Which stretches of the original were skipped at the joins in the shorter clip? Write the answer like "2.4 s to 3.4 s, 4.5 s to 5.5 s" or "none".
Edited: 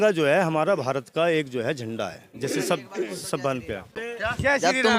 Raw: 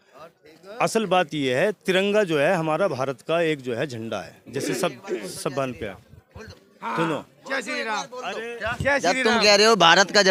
6.1 s to 8.4 s